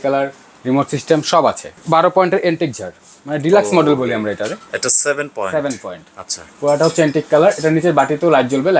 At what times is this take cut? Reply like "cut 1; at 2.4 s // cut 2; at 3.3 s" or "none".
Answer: cut 1; at 1.8 s // cut 2; at 4.7 s